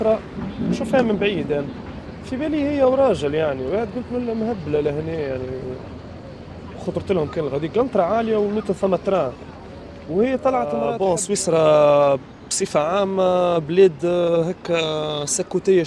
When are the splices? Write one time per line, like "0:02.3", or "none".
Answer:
0:10.9